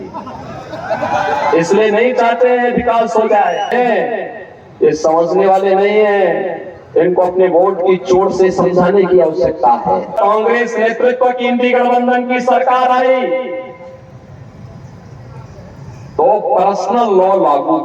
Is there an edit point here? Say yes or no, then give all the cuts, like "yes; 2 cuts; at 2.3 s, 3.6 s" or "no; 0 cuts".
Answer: yes; 2 cuts; at 3.7 s, 10.1 s